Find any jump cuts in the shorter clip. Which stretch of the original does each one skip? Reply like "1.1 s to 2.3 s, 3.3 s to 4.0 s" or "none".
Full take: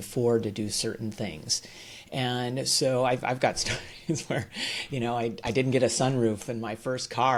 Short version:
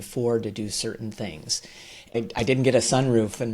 2.1 s to 5.2 s